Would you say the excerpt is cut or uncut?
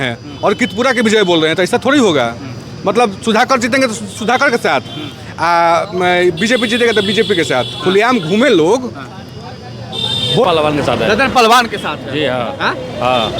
cut